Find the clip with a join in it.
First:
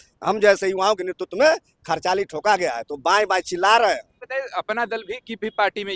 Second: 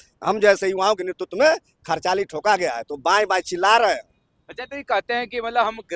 first; 1 cut; at 4.2 s

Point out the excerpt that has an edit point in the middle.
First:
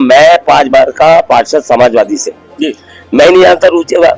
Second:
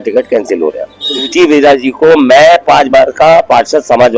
second; 1 cut; at 1.3 s

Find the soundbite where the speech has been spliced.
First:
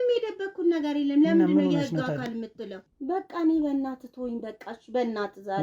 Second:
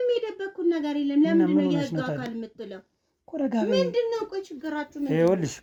first; 1 cut; at 2.9 s

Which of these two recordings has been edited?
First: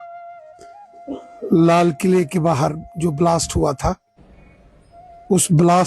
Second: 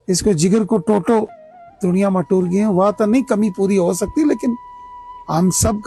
first; 1 cut; at 0.9 s

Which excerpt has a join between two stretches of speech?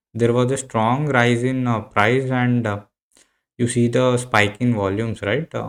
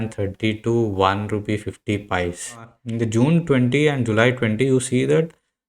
second; 1 cut; at 2.8 s

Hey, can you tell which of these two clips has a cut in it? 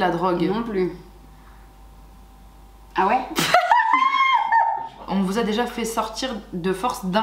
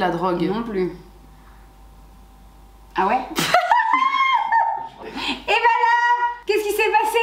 first; 1 cut; at 4.9 s

